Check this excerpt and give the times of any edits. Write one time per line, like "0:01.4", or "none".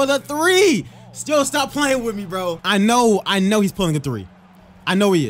0:02.6